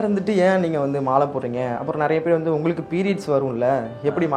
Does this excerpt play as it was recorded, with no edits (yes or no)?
yes